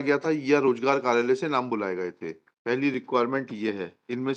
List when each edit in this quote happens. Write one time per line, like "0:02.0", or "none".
0:02.8